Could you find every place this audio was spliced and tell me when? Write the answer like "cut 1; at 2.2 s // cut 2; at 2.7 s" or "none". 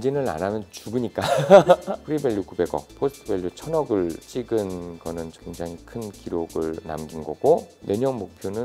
cut 1; at 2.0 s // cut 2; at 7.7 s